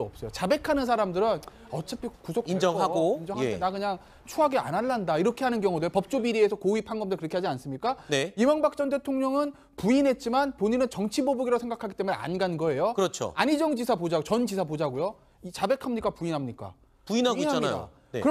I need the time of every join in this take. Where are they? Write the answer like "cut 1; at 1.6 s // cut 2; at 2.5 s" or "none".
cut 1; at 6.6 s